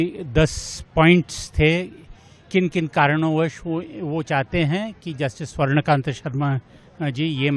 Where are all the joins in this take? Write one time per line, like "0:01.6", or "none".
none